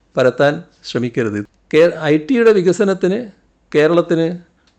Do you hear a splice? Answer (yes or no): yes